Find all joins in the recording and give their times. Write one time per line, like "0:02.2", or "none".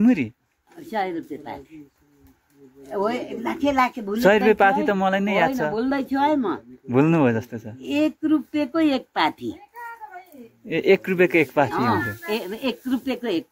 none